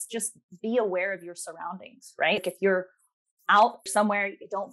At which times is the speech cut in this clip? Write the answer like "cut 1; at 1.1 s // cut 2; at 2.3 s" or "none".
cut 1; at 2.4 s // cut 2; at 3.8 s